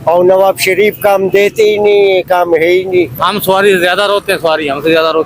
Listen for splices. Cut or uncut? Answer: cut